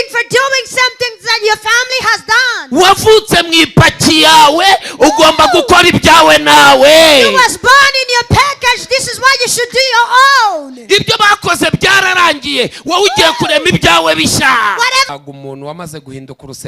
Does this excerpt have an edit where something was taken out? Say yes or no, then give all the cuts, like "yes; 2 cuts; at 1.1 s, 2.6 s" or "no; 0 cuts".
yes; 1 cut; at 15.1 s